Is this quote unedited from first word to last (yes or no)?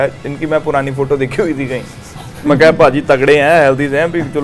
yes